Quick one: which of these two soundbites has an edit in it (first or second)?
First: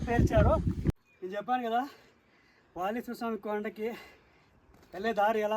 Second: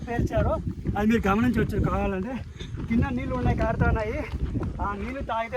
first